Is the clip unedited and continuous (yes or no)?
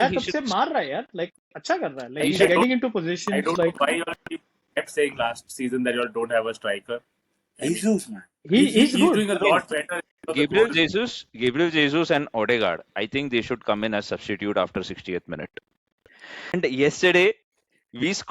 no